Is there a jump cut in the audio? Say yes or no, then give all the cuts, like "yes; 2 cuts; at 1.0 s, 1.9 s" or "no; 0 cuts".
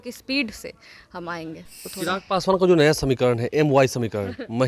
yes; 1 cut; at 1.8 s